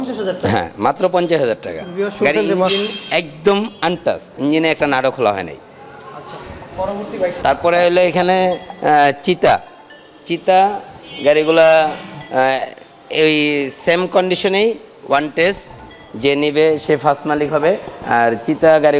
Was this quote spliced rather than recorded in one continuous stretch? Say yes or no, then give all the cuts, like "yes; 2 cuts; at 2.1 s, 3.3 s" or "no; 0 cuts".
no; 0 cuts